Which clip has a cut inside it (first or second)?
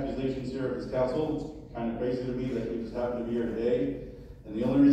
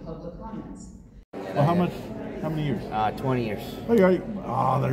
second